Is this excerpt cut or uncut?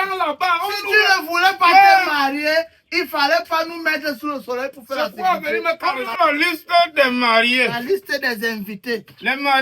cut